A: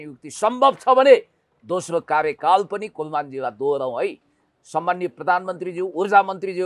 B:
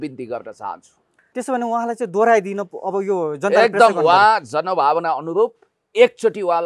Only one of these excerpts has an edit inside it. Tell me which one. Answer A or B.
B